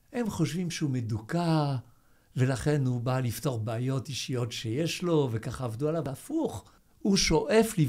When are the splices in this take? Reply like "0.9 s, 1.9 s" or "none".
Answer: 6.6 s